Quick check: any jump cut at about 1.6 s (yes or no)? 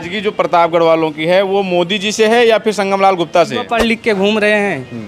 no